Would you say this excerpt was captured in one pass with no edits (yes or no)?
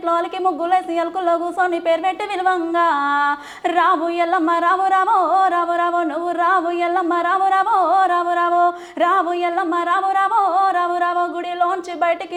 yes